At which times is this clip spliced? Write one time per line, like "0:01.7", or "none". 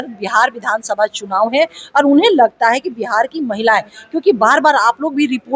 none